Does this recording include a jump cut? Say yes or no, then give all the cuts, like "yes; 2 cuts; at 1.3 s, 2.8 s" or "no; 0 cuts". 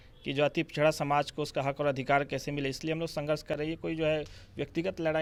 no; 0 cuts